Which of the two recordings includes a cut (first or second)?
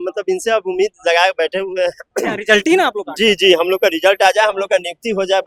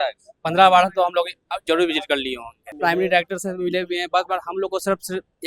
second